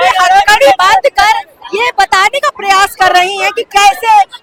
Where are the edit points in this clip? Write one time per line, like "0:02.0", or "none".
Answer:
none